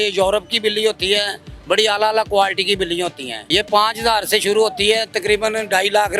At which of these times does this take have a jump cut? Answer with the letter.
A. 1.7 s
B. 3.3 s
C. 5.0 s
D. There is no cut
B